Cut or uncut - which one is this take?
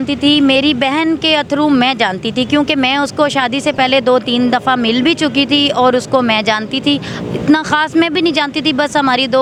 uncut